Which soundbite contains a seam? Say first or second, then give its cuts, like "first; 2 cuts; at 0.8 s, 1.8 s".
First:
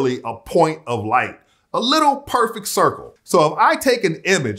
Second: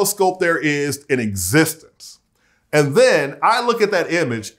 first; 1 cut; at 3.1 s